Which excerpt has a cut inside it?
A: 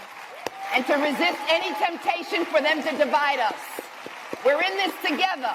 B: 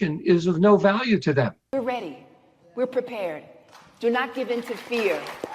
B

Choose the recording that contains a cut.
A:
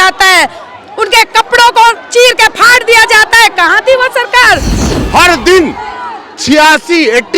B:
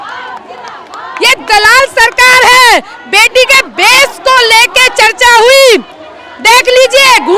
A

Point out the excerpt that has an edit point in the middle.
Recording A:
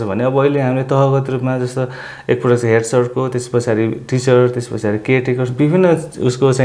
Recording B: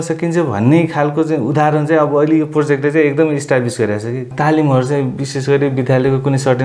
B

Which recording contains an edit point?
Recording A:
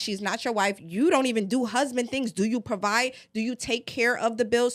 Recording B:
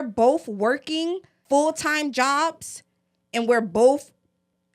B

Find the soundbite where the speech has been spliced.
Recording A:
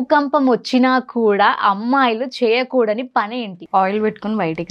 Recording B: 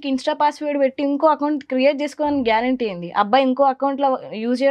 A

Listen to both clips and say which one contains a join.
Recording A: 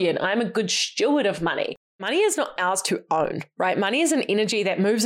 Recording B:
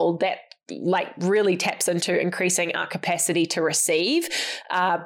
A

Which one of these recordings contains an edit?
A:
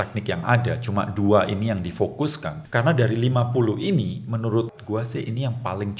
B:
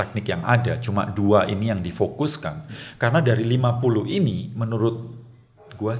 A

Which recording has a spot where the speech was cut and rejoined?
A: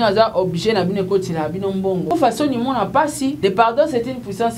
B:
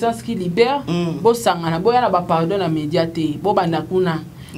A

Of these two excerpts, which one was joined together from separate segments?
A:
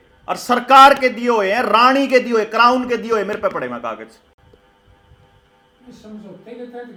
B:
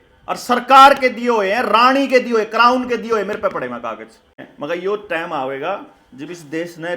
B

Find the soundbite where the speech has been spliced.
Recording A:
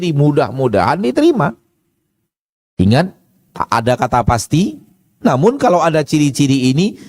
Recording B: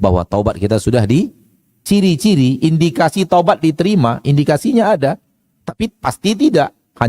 B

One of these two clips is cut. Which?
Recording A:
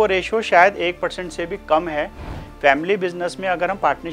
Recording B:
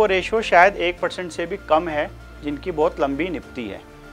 A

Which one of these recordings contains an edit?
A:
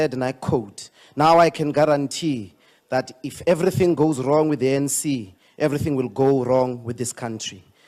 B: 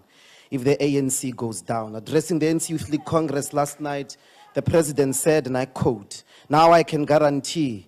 B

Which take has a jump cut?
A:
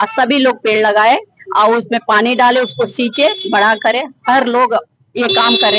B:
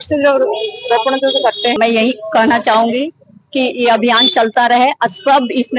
B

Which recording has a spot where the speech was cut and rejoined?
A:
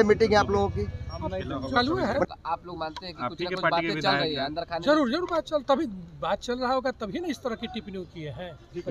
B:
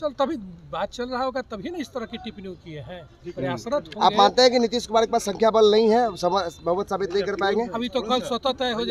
A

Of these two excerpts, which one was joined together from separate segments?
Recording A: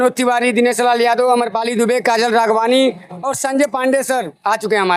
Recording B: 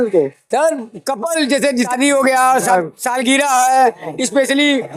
B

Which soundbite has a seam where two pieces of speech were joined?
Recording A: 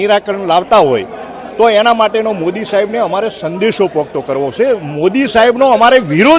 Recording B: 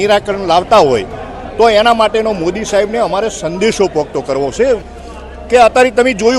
B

